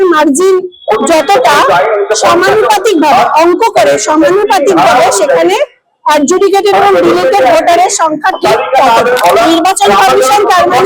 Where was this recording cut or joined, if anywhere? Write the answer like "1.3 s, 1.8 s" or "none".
9.2 s